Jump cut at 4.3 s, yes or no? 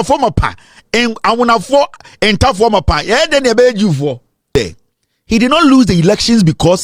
yes